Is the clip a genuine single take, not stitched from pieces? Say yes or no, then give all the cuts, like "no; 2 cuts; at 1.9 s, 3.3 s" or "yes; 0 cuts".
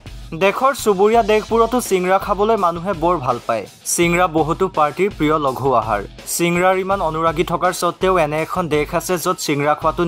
yes; 0 cuts